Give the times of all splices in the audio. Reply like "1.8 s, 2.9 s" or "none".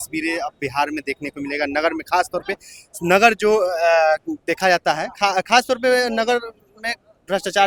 none